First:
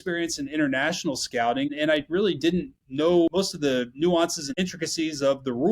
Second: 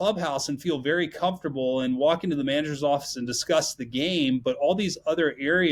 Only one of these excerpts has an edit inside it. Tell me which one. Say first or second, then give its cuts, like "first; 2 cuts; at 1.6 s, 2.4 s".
first; 3 cuts; at 1.7 s, 3.3 s, 4.4 s